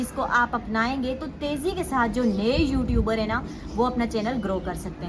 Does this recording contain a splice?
no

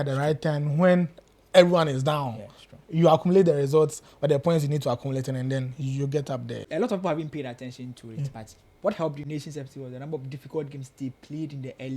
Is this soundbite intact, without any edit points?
no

